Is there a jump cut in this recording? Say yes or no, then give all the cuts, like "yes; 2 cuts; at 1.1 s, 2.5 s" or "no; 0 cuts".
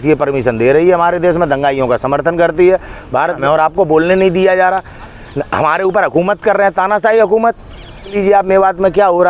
yes; 2 cuts; at 3.4 s, 8.1 s